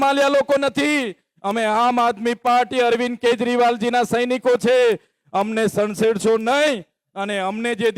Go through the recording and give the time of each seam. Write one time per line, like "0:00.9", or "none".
none